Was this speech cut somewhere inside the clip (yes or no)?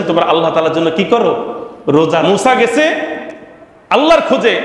yes